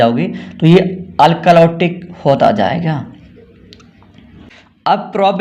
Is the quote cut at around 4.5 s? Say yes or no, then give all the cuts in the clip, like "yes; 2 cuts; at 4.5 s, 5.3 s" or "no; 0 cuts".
yes; 1 cut; at 4.5 s